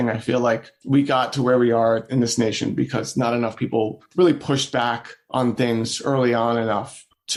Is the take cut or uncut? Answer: uncut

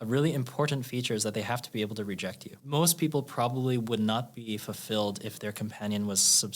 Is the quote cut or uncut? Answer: cut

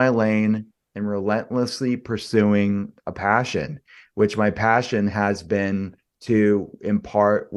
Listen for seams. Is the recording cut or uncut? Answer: uncut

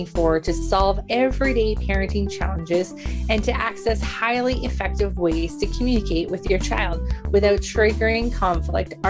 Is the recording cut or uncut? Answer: uncut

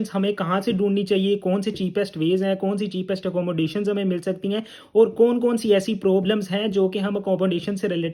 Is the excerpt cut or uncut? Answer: uncut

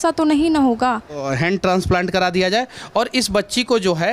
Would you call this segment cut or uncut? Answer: cut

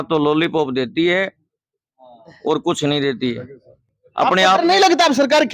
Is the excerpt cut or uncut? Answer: uncut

